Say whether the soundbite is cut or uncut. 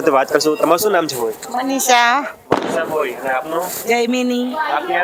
uncut